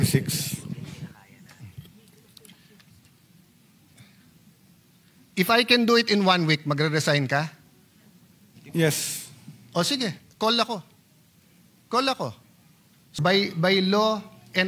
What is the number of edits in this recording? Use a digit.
1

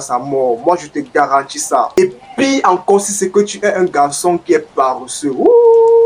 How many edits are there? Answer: 1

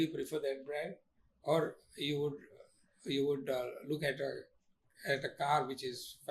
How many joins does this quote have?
0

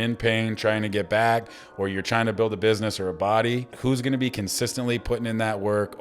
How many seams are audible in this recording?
1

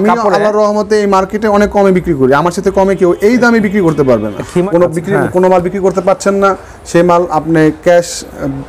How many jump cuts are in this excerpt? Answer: 1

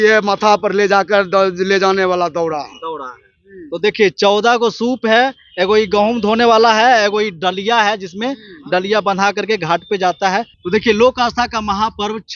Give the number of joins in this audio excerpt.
0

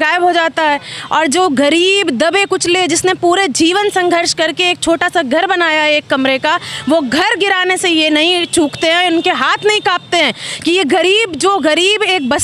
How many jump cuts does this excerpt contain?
0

